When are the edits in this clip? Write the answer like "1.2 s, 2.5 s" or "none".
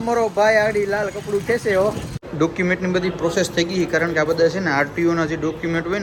none